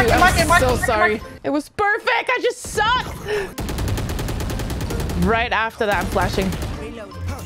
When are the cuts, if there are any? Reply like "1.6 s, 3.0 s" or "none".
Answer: 1.3 s, 3.5 s